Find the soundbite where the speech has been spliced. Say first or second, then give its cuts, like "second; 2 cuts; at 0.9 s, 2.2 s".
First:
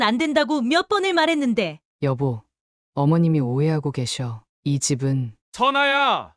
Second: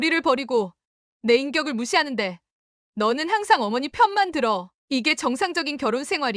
first; 2 cuts; at 1.8 s, 5.4 s